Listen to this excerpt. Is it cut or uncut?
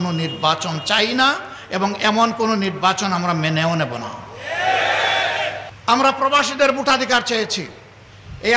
cut